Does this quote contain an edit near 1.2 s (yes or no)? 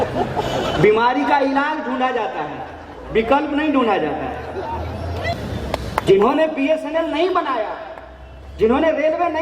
no